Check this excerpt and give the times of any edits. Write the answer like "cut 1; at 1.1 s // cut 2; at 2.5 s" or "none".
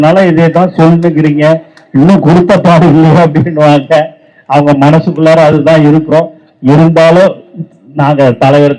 none